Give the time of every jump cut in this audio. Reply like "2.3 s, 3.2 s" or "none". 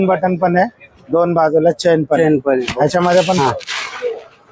3.4 s